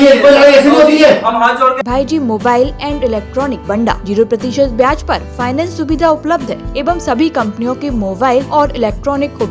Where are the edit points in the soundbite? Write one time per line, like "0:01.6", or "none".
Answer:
0:01.8
0:03.7
0:06.7
0:08.5